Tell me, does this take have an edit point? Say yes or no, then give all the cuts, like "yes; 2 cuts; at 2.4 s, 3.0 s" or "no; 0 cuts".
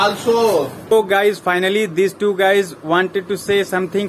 yes; 1 cut; at 0.9 s